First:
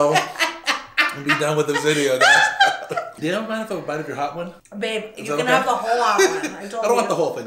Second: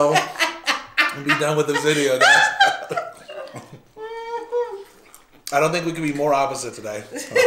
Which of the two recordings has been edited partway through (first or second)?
first